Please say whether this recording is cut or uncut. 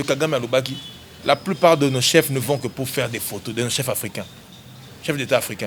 uncut